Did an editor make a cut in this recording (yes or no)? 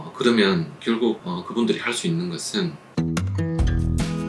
yes